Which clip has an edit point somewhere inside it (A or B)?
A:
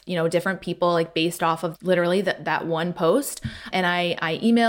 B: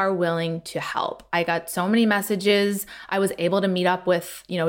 A